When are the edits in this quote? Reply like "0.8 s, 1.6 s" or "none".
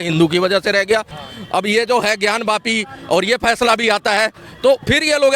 1.2 s